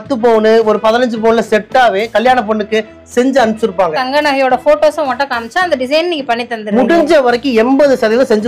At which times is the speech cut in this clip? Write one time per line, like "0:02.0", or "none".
0:04.0